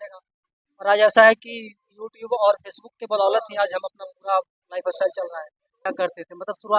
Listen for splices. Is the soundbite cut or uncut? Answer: cut